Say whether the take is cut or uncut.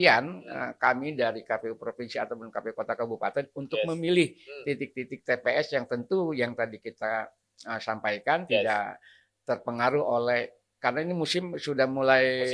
uncut